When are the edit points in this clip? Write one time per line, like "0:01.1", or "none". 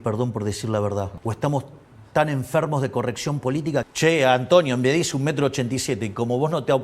0:01.1
0:03.9